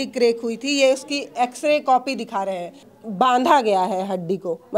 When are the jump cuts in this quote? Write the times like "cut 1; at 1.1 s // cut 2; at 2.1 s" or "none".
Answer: cut 1; at 2.8 s